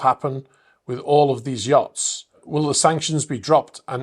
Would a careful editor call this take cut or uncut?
cut